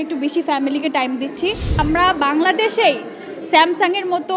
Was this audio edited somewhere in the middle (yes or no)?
yes